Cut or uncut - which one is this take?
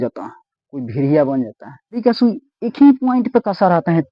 cut